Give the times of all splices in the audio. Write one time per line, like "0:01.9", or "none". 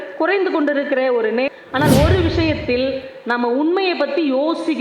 0:01.5